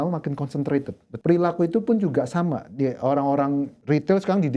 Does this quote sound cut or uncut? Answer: cut